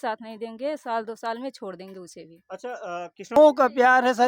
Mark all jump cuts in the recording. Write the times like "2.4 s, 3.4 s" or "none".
3.4 s